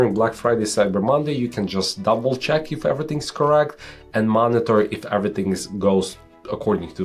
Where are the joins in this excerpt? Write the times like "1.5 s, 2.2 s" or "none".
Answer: none